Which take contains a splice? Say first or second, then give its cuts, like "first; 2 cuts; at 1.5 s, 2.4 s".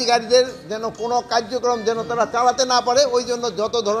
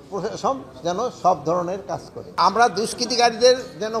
second; 1 cut; at 2.1 s